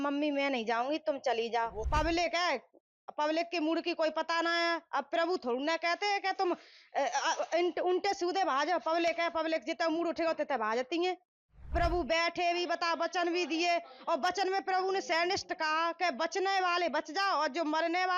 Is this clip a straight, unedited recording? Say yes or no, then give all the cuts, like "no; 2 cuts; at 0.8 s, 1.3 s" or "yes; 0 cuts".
no; 2 cuts; at 1.8 s, 11.7 s